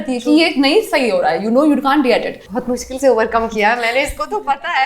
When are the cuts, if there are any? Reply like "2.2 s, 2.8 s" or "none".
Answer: 2.5 s